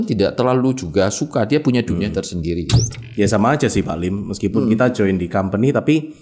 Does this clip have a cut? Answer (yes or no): yes